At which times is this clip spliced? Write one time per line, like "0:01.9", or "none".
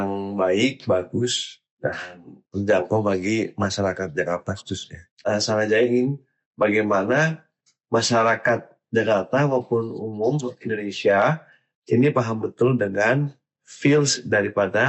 0:05.1